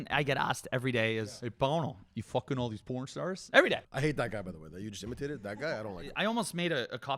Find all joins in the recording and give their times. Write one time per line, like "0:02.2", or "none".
0:01.2
0:03.9
0:06.1